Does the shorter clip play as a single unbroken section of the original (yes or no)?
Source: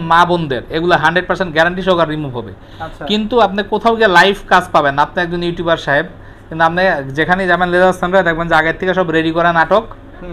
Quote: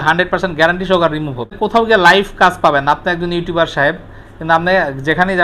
no